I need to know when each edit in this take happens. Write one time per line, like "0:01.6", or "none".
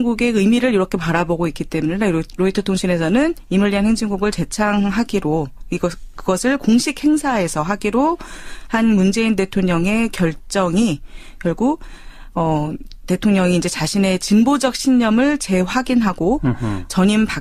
none

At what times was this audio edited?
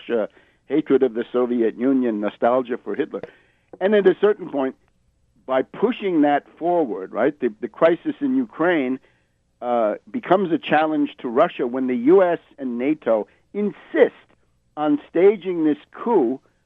0:09.6

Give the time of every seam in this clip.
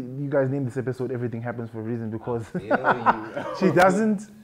none

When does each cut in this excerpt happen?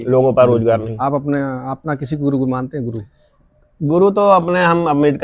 0:00.9

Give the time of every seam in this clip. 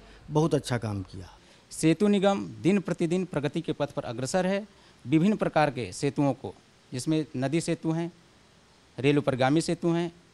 0:01.4

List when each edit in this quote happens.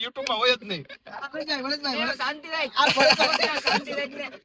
none

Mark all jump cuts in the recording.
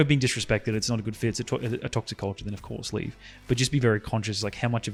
none

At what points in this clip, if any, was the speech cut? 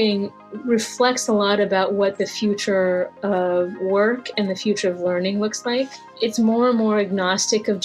0:06.1

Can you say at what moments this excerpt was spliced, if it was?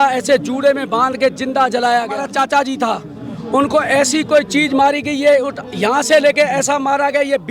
0:02.3

